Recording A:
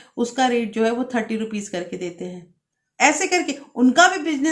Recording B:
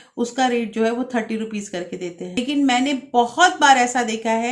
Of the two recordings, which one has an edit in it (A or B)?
B